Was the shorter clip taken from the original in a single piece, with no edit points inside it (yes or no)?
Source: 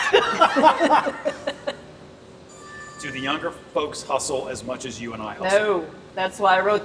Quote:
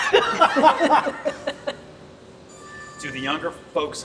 yes